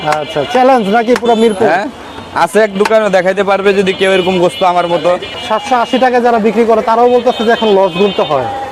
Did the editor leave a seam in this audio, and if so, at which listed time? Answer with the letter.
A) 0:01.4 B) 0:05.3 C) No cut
B